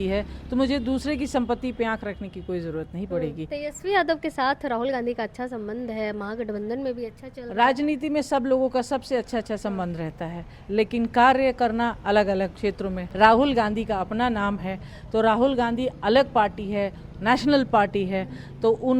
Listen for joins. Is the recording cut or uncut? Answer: cut